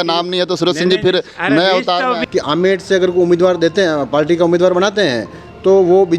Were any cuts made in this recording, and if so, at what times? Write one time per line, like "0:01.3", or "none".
0:02.2